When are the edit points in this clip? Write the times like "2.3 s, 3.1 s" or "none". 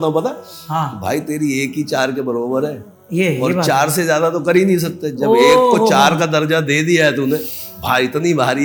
none